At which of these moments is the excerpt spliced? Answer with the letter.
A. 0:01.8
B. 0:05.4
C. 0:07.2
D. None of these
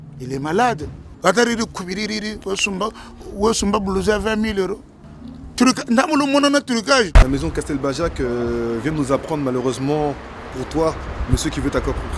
C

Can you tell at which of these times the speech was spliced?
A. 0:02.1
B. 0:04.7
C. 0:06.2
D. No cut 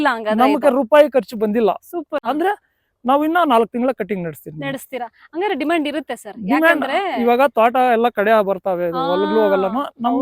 A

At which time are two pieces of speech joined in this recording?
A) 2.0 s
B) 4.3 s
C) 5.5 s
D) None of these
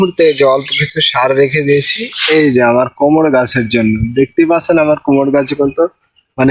D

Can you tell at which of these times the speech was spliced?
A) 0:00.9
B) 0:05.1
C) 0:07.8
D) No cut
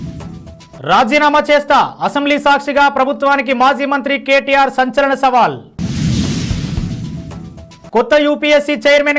A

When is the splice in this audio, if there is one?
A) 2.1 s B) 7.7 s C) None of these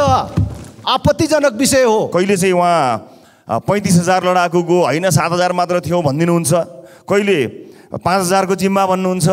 A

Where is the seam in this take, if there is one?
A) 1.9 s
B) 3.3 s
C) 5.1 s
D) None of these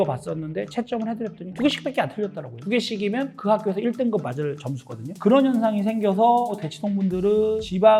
C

